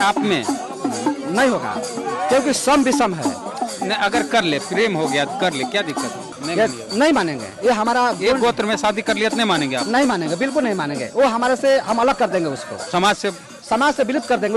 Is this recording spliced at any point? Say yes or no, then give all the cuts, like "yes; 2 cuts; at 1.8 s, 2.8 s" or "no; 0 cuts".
yes; 1 cut; at 6.2 s